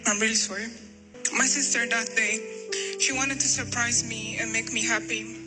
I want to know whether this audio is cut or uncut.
cut